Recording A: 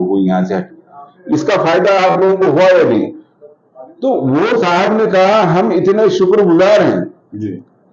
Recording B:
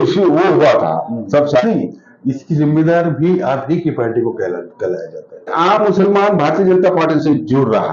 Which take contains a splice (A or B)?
B